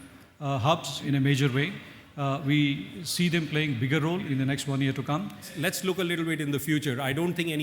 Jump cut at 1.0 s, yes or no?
yes